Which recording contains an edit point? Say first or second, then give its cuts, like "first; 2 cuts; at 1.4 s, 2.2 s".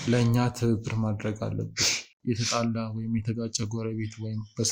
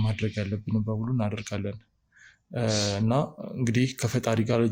first; 1 cut; at 2.1 s